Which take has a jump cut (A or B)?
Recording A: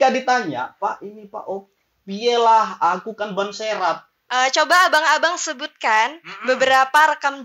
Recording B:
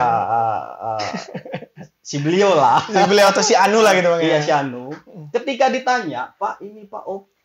A